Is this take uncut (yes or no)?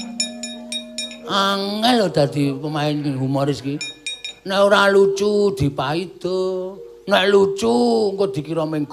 yes